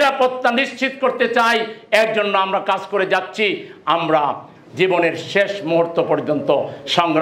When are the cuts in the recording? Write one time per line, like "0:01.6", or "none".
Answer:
none